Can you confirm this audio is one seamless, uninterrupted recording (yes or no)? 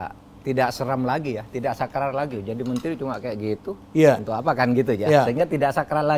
yes